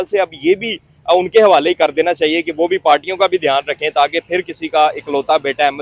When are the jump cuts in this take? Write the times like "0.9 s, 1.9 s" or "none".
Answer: none